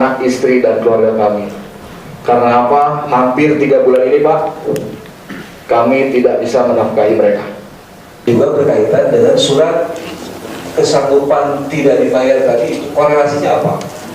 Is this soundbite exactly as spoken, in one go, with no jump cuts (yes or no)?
no